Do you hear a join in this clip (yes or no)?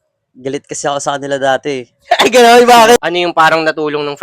yes